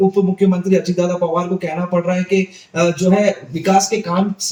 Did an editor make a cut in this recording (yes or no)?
no